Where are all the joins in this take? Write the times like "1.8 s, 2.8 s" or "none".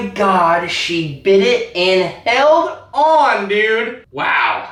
none